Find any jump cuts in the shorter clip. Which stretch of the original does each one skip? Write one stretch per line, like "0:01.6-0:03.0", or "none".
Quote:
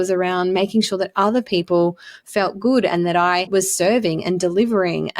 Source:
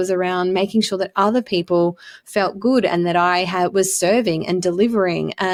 0:03.5-0:03.7